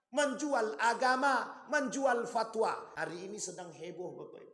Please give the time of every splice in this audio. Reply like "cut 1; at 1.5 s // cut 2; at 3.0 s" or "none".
cut 1; at 2.9 s